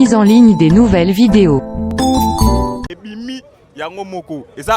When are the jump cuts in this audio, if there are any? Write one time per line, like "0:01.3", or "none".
0:03.0